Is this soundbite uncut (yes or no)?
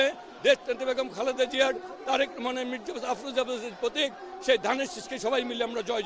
yes